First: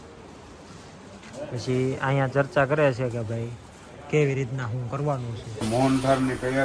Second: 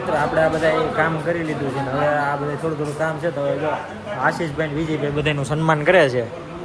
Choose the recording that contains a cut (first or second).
first